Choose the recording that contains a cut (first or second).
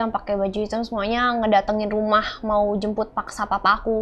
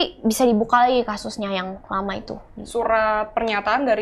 second